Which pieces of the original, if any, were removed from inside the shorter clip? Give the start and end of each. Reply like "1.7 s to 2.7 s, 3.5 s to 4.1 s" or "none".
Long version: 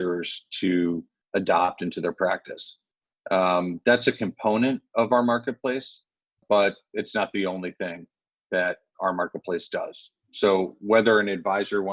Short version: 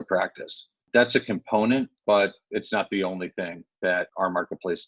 2.9 s to 3.7 s, 4.9 s to 6.4 s, 8.4 s to 8.8 s